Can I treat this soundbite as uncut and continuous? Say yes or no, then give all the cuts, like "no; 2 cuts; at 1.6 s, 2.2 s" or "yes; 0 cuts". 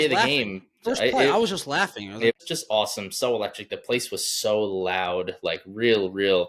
no; 1 cut; at 2.3 s